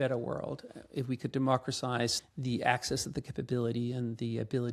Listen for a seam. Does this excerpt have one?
yes; 1 cut; at 2.2 s

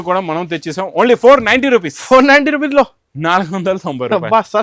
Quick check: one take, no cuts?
yes; 0 cuts

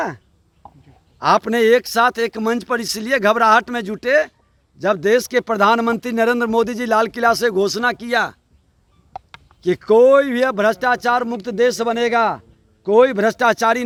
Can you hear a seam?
no; 0 cuts

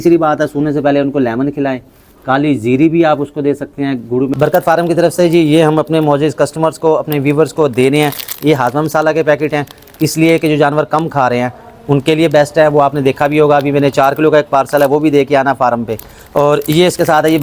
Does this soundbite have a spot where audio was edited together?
yes; 1 cut; at 4.3 s

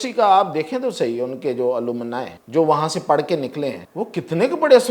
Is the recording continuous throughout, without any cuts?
no; 2 cuts; at 2.3 s, 3.8 s

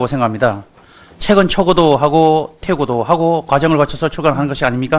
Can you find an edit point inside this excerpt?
yes; 1 cut; at 3.9 s

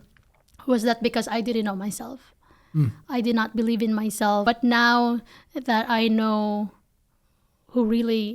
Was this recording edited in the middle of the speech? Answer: yes; 1 cut; at 4.4 s

